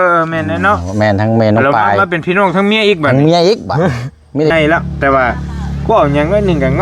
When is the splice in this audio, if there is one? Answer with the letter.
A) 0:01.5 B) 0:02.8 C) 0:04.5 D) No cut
C